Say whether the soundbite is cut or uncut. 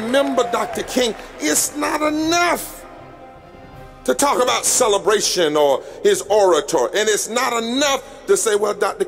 uncut